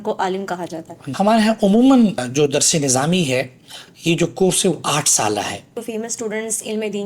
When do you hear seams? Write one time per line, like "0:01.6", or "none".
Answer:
0:01.0
0:02.3
0:05.8